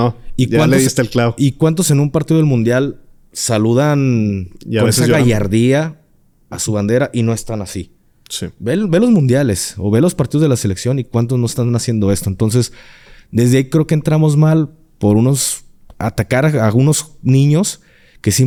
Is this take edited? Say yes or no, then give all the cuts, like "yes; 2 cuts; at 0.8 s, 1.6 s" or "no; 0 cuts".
no; 0 cuts